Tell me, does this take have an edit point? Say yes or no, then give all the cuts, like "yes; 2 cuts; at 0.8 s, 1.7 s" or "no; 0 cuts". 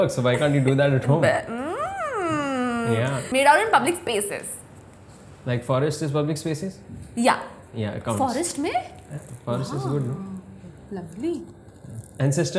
yes; 1 cut; at 3.3 s